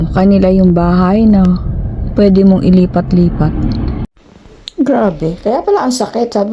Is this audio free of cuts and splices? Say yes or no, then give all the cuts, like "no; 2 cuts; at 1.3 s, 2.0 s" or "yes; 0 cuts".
no; 1 cut; at 4.0 s